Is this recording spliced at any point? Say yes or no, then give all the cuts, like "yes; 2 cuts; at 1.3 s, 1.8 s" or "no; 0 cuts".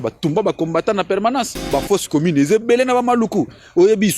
yes; 1 cut; at 1.7 s